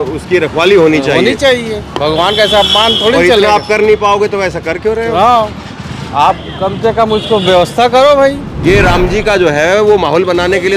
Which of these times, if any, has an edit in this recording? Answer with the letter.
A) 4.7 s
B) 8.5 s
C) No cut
B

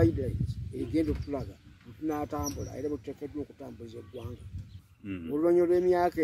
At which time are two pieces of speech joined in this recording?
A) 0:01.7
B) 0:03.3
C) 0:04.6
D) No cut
C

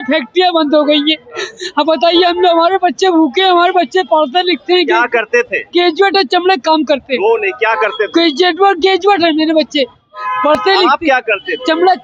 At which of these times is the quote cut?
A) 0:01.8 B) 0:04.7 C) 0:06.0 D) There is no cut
D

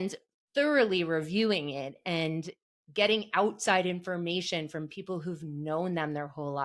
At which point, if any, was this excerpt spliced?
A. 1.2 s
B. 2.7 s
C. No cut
C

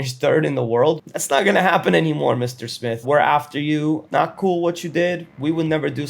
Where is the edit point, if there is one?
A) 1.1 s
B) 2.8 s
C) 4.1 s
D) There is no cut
A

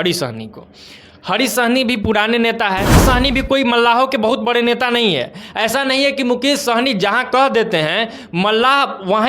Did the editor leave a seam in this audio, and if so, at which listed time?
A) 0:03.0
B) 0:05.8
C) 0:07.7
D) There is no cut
A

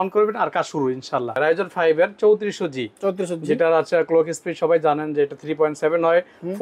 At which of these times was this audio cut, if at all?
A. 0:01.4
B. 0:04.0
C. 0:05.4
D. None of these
A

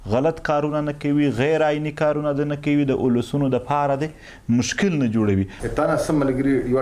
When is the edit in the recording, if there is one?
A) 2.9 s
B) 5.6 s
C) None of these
B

